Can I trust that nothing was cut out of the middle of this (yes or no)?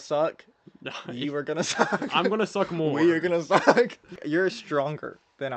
no